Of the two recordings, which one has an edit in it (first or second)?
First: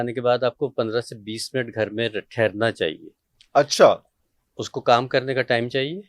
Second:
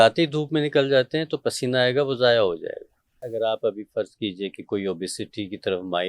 second